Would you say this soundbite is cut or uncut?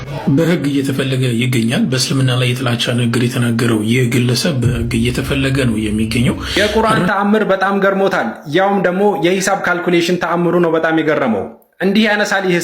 cut